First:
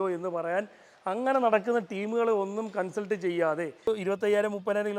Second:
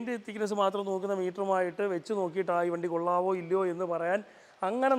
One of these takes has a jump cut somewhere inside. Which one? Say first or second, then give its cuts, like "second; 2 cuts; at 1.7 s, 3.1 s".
first; 1 cut; at 3.9 s